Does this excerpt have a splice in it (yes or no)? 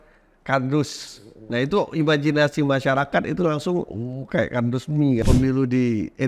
yes